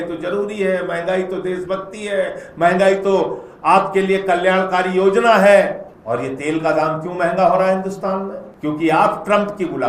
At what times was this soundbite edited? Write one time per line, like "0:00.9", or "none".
0:05.9
0:08.4